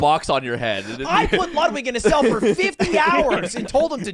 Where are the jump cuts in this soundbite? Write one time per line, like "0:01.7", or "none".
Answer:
none

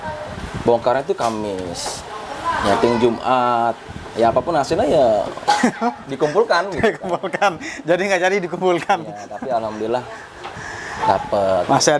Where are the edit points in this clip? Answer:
none

